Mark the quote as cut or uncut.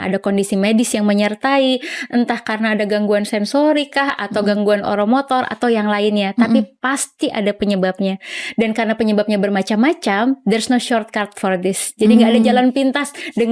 uncut